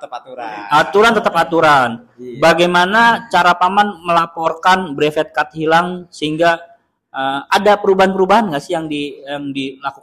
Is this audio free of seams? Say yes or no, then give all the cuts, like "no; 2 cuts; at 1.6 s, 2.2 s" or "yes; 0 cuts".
yes; 0 cuts